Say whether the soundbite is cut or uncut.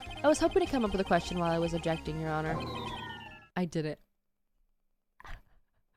uncut